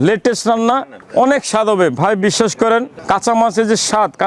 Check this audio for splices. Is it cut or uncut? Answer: cut